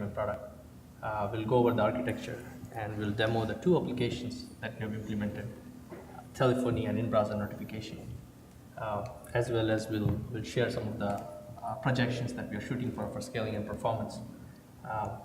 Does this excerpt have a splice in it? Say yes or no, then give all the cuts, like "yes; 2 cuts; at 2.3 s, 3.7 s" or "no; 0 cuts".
yes; 1 cut; at 11.7 s